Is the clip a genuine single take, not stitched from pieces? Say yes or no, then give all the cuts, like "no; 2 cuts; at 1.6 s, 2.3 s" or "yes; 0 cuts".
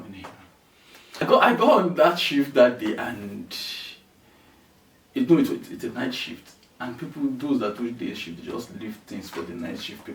no; 1 cut; at 1.2 s